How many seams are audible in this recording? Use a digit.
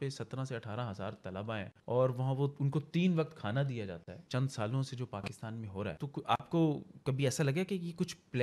3